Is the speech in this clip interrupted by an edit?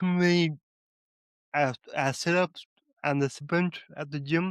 yes; 1 cut; at 3.4 s

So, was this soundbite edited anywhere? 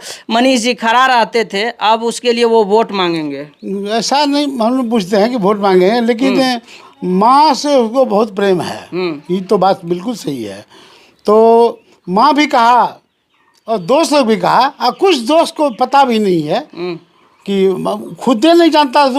no; 0 cuts

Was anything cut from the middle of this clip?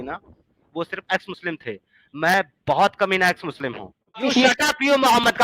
yes; 1 cut; at 4.2 s

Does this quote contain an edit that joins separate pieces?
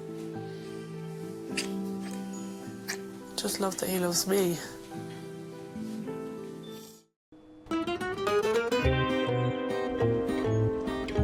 no; 0 cuts

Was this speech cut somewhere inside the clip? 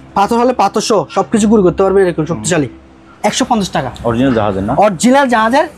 yes; 1 cut; at 3.1 s

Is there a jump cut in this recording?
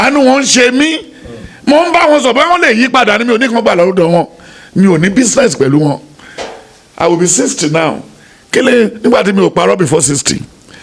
no; 0 cuts

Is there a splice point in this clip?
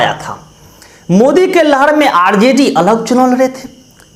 no; 0 cuts

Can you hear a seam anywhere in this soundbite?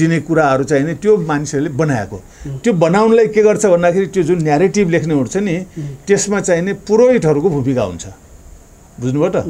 no; 0 cuts

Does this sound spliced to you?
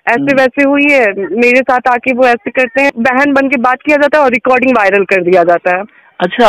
yes; 1 cut; at 2.9 s

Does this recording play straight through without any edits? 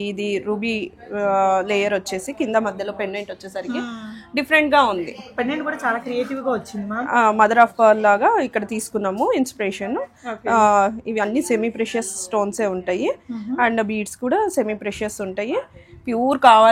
yes; 0 cuts

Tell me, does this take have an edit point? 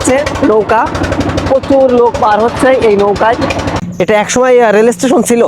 yes; 1 cut; at 3.8 s

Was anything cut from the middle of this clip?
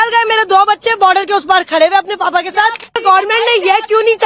yes; 1 cut; at 3.0 s

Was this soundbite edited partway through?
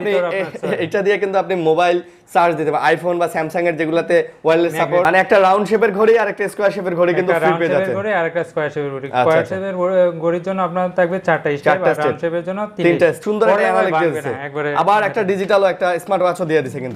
yes; 2 cuts; at 5.0 s, 13.2 s

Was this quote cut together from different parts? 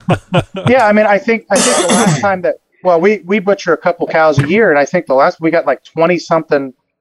no; 0 cuts

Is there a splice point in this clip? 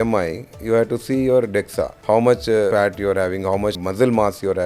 yes; 3 cuts; at 1.9 s, 2.7 s, 3.8 s

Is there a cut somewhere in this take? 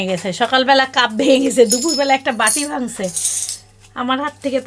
no; 0 cuts

